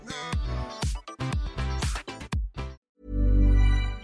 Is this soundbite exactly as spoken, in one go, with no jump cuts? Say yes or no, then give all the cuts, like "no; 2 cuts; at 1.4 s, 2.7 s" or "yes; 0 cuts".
no; 1 cut; at 2.9 s